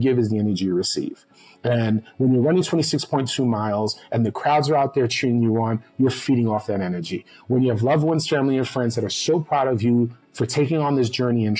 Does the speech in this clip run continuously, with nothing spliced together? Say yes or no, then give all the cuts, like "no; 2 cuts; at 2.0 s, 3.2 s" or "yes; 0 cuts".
yes; 0 cuts